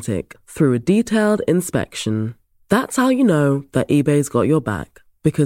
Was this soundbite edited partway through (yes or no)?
no